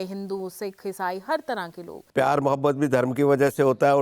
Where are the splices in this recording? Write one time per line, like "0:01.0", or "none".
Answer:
0:01.9

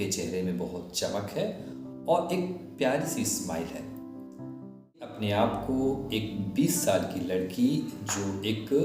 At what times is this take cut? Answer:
0:05.1

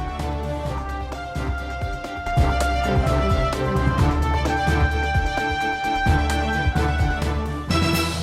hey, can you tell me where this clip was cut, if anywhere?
0:02.2

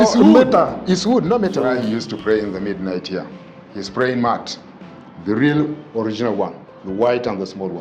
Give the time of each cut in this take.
0:01.5

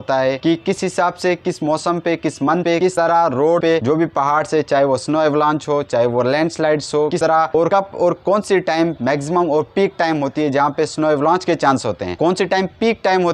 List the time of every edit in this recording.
none

